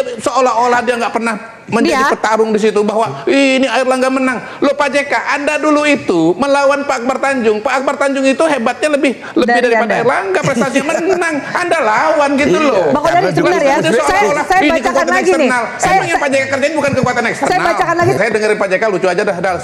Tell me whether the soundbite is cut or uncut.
cut